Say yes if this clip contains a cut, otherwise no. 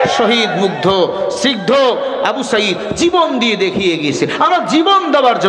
no